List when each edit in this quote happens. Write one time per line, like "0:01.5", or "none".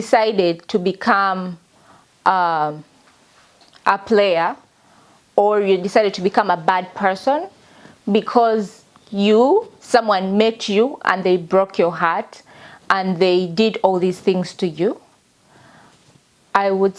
none